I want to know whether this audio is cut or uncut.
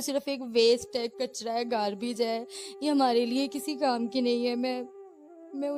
uncut